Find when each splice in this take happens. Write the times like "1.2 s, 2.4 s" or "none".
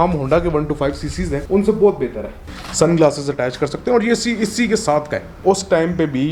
1.4 s, 2.5 s, 5.2 s